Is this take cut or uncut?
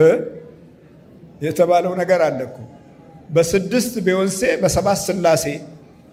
uncut